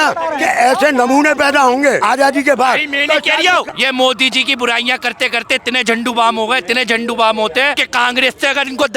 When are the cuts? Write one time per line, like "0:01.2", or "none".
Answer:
0:02.0
0:03.7
0:07.8